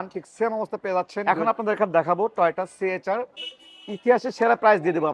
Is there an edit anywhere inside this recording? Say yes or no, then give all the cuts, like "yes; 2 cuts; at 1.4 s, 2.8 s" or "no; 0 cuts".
yes; 1 cut; at 1.2 s